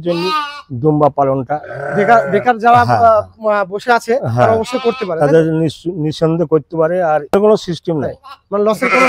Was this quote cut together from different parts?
yes; 1 cut; at 7.3 s

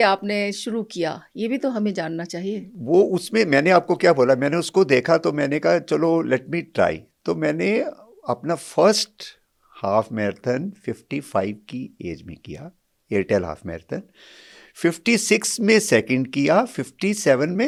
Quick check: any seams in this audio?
no; 0 cuts

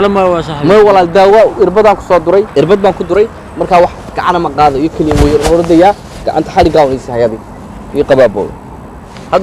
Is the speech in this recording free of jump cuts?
no; 1 cut; at 2.5 s

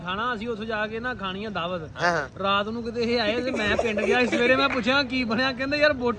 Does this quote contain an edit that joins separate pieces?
no; 0 cuts

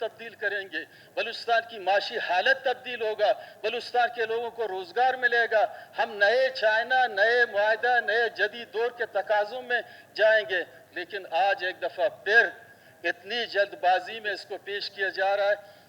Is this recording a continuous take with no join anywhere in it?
yes; 0 cuts

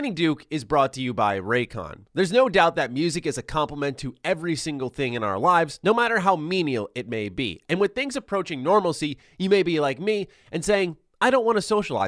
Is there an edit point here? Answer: no; 0 cuts

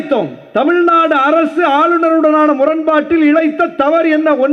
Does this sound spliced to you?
no; 0 cuts

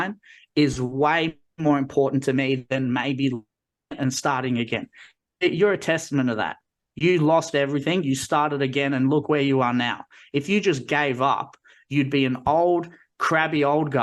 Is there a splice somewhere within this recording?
no; 0 cuts

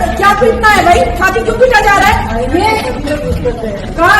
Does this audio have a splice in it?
no; 0 cuts

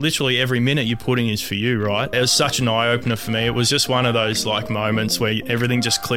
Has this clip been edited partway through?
yes; 1 cut; at 2.1 s

